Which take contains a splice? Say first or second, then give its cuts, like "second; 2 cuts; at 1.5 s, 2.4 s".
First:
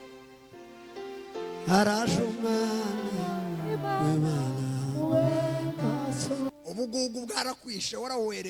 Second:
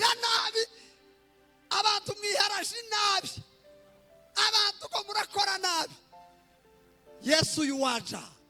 first; 1 cut; at 6.5 s